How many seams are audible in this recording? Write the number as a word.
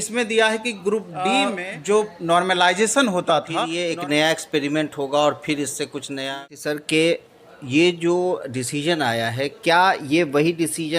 three